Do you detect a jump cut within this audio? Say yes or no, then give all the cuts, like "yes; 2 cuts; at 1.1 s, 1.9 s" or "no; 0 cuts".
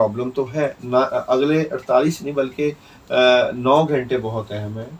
no; 0 cuts